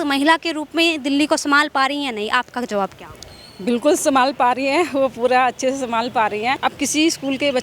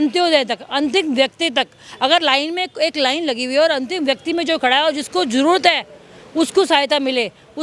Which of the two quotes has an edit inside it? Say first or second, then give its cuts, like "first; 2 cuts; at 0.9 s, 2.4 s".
first; 1 cut; at 6.6 s